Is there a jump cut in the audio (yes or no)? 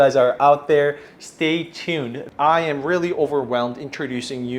yes